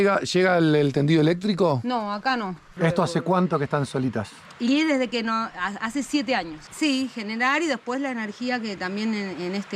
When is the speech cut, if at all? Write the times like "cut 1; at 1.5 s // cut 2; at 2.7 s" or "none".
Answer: cut 1; at 2.6 s // cut 2; at 6.6 s